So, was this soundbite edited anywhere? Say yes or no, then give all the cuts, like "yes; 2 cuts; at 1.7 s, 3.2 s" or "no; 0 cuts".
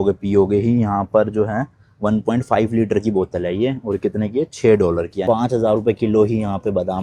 yes; 1 cut; at 5.3 s